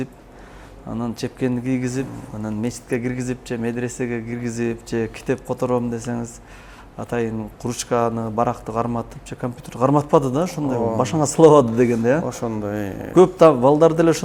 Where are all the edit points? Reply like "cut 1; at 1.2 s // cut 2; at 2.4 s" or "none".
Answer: none